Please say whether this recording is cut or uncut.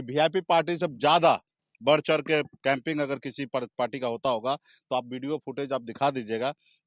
uncut